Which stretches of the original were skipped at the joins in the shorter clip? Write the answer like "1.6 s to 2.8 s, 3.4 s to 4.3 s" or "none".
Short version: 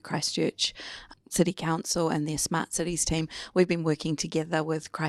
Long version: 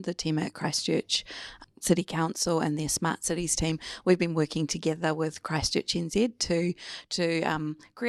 none

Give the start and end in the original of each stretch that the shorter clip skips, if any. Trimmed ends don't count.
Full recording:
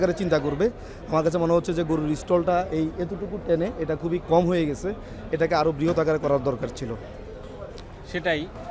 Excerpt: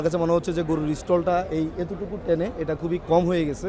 none

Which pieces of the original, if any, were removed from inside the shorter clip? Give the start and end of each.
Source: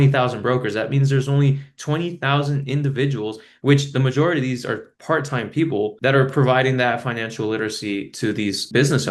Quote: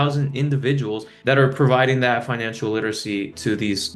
3.5 s to 6.0 s

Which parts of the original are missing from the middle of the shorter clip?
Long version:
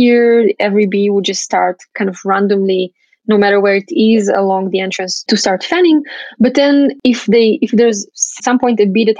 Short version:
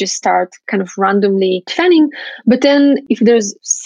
3.0 s to 5.6 s, 7.0 s to 7.6 s

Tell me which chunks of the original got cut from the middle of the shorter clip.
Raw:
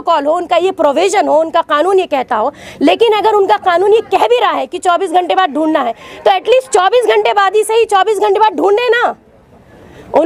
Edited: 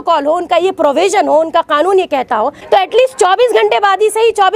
2.6 s to 6.1 s

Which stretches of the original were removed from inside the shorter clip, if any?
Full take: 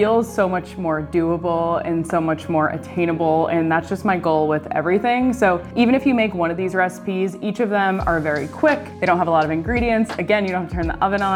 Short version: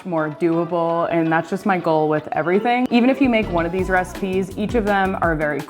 1.8 s to 3.5 s, 5.2 s to 5.7 s

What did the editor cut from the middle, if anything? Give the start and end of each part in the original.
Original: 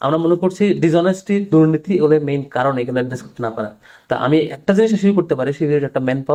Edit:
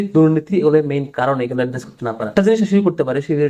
3.6 s to 4.6 s

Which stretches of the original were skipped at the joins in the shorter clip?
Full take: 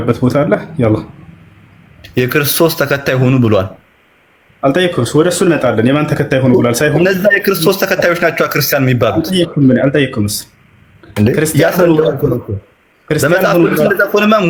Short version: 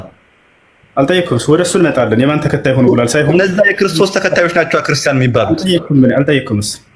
none

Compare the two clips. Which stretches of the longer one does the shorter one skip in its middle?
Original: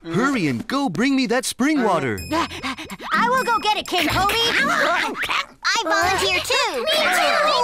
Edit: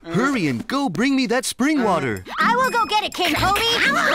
2.2 s to 2.9 s

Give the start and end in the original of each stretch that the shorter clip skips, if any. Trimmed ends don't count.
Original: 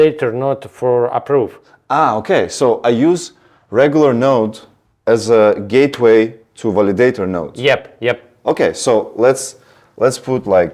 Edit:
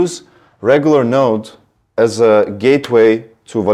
none

